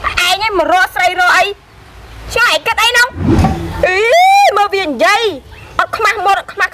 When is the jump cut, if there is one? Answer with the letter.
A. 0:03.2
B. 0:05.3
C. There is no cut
A